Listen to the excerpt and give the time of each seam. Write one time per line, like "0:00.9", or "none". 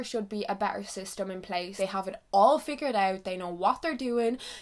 0:01.7